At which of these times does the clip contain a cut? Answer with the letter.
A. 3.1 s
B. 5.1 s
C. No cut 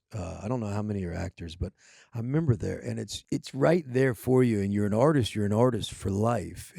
A